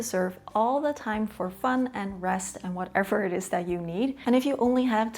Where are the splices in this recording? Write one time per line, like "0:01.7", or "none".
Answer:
0:04.2